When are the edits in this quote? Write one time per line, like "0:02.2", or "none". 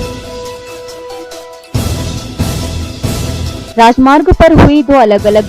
0:01.5